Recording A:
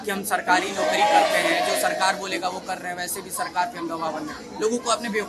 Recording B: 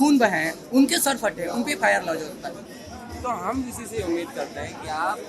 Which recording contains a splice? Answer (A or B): B